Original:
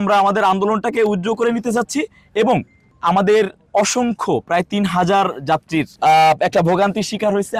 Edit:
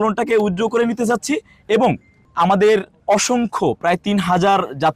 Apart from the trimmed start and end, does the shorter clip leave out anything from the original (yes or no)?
no